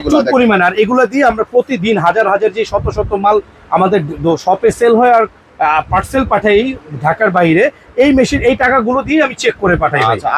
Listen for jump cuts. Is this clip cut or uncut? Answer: uncut